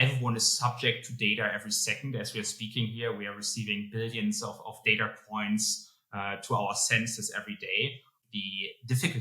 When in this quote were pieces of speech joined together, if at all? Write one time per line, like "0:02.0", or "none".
0:08.1